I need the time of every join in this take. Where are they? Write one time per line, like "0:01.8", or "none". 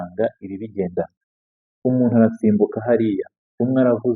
0:01.2